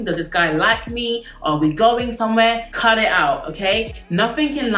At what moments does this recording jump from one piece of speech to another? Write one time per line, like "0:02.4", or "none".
none